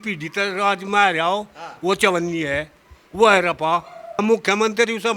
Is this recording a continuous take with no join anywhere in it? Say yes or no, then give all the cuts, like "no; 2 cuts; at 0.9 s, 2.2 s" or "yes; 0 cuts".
no; 1 cut; at 4.2 s